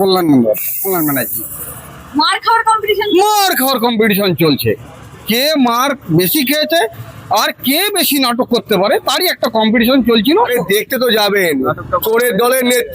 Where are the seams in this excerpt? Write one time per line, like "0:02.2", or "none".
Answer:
0:10.4